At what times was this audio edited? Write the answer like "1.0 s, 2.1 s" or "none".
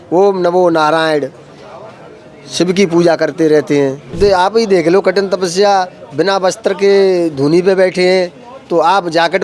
4.1 s